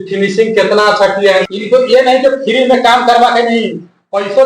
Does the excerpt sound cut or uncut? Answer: cut